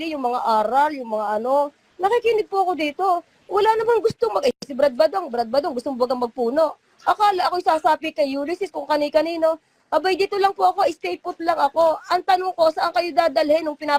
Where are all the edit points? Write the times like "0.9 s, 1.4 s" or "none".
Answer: none